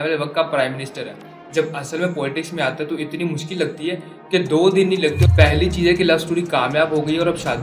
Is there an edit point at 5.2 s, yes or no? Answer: yes